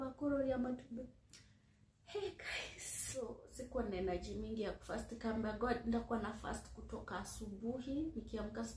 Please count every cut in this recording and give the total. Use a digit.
1